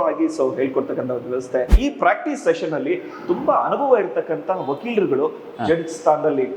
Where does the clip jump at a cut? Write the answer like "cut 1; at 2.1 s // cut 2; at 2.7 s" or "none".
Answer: cut 1; at 1.7 s